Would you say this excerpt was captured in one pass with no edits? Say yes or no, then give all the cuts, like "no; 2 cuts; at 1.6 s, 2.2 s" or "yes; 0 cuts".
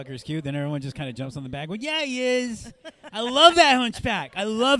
yes; 0 cuts